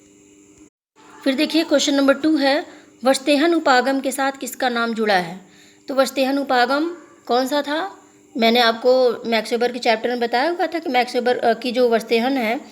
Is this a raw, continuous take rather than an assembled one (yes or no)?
no